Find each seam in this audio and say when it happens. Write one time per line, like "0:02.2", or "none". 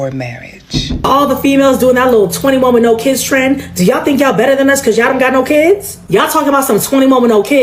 0:01.0